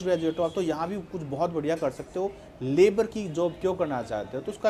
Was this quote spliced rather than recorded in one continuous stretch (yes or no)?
no